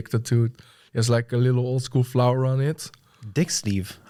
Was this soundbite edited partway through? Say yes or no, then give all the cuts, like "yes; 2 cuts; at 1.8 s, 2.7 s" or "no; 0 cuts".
no; 0 cuts